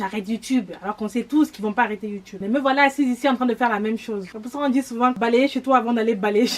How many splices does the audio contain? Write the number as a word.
three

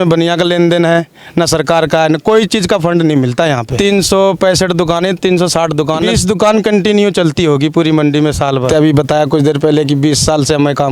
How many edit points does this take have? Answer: three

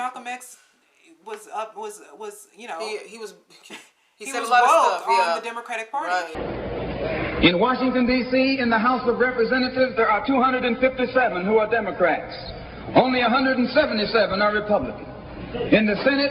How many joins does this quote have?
one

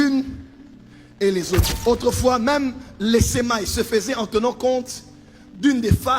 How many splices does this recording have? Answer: one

